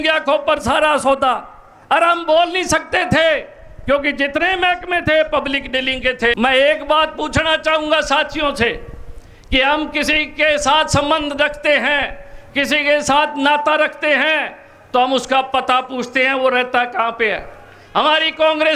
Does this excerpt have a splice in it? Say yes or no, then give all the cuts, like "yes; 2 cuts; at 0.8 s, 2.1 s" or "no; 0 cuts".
yes; 1 cut; at 6.4 s